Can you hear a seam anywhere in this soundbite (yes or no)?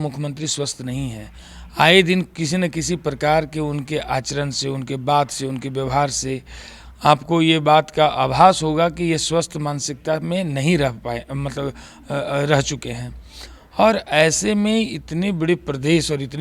no